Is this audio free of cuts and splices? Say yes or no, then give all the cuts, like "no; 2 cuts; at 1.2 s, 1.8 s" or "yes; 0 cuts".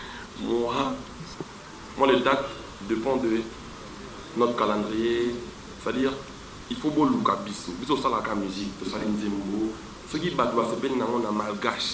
yes; 0 cuts